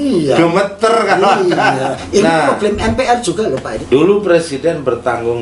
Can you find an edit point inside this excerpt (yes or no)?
yes